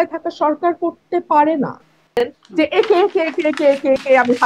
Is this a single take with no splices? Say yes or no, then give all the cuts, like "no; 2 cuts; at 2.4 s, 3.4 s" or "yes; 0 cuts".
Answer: no; 1 cut; at 2.2 s